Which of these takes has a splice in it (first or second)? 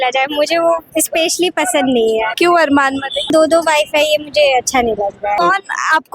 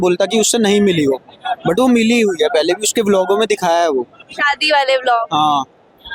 first